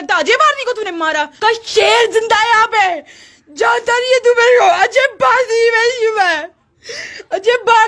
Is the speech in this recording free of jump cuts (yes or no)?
no